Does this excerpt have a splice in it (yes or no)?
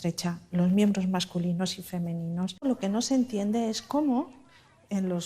yes